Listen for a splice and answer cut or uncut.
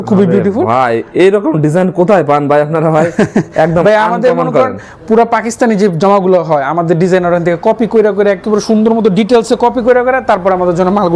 uncut